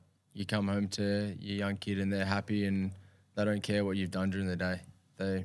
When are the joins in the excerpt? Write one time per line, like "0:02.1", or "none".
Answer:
none